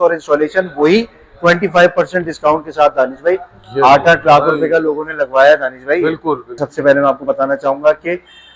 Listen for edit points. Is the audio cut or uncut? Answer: cut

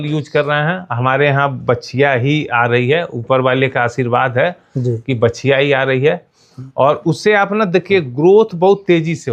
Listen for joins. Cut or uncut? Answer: uncut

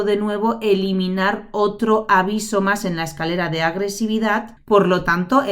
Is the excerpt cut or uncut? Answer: cut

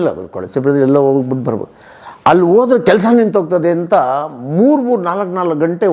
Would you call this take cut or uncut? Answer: uncut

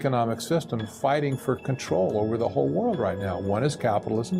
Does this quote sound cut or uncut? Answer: uncut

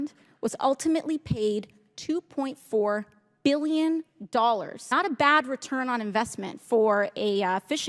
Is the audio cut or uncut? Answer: cut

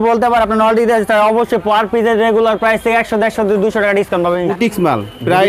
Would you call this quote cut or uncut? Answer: cut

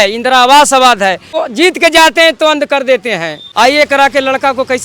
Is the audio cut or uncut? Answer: cut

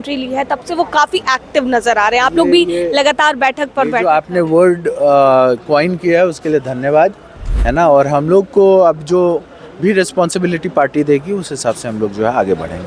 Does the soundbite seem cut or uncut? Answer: uncut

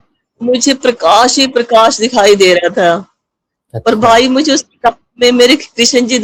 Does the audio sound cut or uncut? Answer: uncut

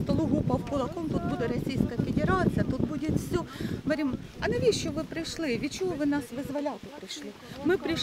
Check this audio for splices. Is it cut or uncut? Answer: uncut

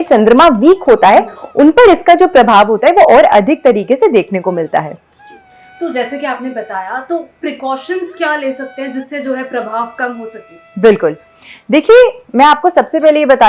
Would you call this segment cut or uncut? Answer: uncut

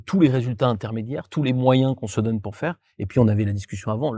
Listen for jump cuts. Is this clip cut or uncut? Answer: uncut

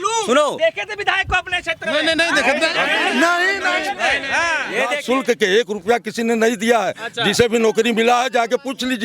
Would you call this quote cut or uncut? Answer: cut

